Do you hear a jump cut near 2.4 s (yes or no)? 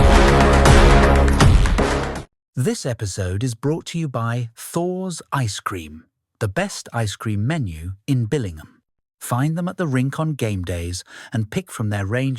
yes